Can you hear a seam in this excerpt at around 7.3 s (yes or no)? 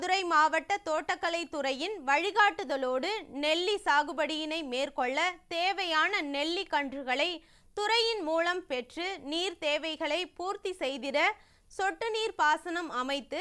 no